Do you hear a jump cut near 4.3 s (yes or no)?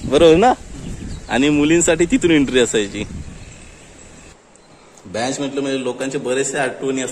yes